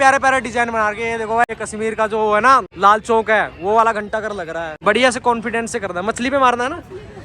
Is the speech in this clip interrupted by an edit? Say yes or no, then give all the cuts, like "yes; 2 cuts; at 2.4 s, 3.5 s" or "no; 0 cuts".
yes; 3 cuts; at 1.4 s, 2.7 s, 4.6 s